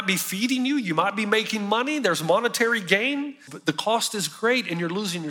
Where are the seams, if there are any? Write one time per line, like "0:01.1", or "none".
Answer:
0:03.5